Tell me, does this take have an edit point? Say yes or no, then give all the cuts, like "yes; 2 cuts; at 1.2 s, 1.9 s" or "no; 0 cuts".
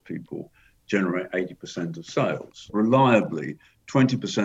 yes; 1 cut; at 2.6 s